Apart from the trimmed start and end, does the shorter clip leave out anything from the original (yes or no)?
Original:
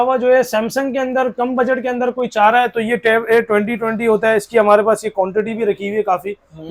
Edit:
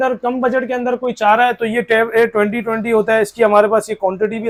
no